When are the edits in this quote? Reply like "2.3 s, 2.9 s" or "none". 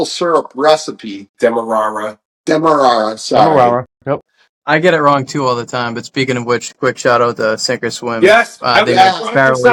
none